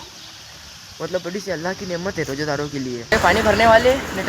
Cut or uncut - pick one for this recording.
cut